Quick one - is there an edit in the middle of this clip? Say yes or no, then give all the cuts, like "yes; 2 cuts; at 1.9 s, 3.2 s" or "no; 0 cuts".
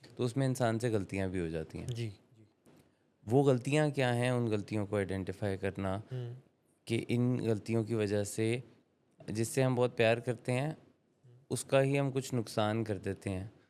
no; 0 cuts